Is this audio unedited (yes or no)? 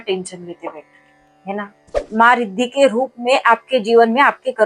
no